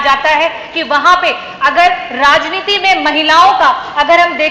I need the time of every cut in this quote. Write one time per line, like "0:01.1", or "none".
none